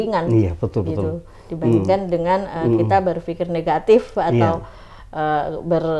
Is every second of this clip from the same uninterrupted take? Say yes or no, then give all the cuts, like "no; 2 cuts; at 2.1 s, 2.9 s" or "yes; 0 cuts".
yes; 0 cuts